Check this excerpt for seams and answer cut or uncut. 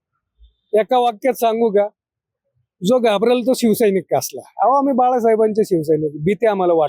uncut